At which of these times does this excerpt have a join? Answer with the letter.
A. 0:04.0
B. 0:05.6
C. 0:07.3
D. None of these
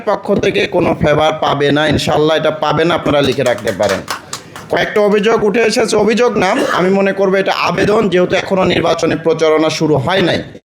D